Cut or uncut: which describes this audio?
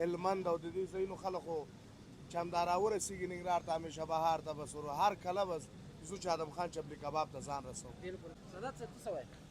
cut